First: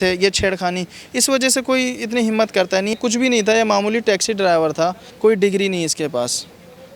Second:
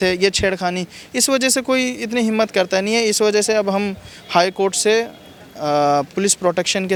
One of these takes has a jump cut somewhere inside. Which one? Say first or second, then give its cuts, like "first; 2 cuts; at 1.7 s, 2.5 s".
first; 2 cuts; at 3.0 s, 5.0 s